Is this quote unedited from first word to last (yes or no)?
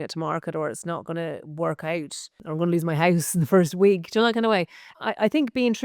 no